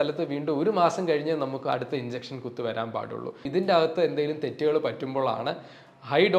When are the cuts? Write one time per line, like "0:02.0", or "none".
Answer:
0:03.5